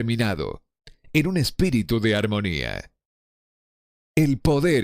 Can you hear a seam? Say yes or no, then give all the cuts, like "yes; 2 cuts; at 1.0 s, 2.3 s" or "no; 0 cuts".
yes; 1 cut; at 0.9 s